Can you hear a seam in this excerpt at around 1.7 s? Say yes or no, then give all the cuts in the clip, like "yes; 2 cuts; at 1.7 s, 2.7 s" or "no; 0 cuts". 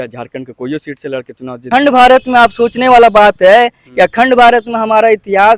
yes; 1 cut; at 1.7 s